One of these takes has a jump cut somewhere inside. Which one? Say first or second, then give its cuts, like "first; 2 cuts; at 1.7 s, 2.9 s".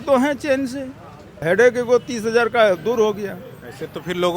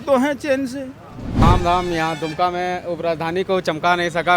second; 1 cut; at 1.4 s